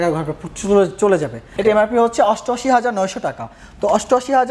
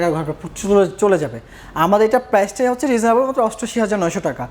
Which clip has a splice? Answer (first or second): first